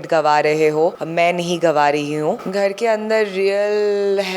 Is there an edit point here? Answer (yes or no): yes